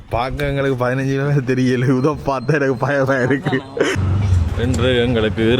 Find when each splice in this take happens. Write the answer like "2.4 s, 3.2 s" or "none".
4.0 s